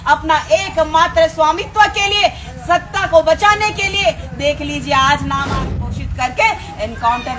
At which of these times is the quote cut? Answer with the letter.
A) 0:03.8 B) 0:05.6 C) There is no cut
B